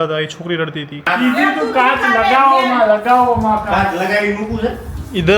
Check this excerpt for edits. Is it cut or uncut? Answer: cut